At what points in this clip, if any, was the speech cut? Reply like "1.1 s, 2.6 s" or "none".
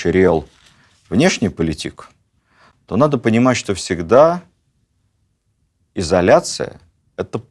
none

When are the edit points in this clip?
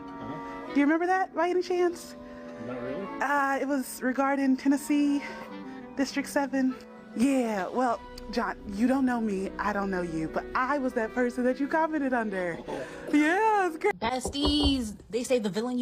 13.9 s

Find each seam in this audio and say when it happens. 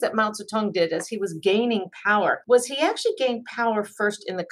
2.4 s

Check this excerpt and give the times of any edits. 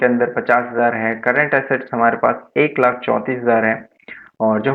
none

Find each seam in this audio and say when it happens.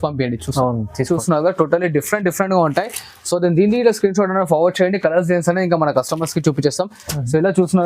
1.1 s

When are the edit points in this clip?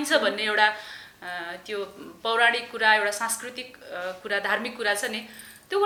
none

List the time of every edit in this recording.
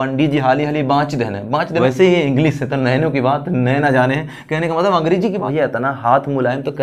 1.8 s, 5.4 s

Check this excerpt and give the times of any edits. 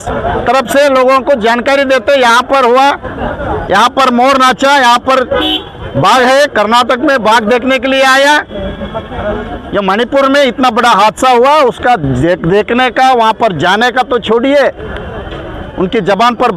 none

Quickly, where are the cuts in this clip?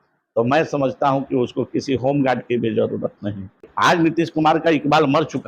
3.6 s

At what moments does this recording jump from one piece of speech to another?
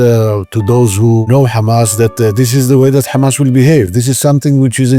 1.2 s

